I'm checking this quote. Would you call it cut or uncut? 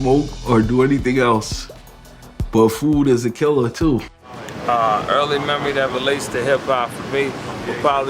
cut